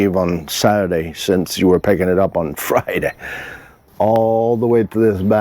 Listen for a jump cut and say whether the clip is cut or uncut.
cut